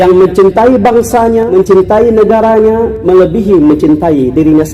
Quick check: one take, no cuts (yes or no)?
no